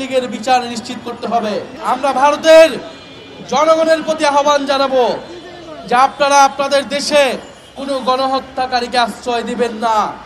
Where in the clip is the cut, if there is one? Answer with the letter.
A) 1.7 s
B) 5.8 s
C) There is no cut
A